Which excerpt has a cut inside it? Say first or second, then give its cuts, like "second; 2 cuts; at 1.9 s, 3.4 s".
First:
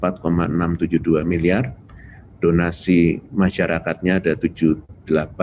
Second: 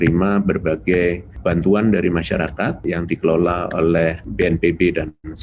second; 3 cuts; at 1.3 s, 2.8 s, 4.2 s